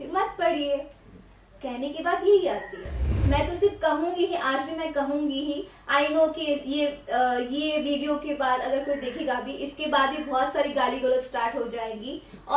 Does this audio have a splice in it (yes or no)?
yes